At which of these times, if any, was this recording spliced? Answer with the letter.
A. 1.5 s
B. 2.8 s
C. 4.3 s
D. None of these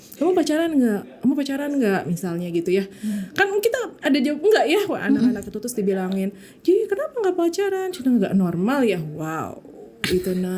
D